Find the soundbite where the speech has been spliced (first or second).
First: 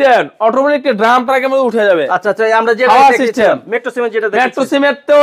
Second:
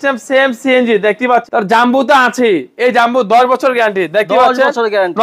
second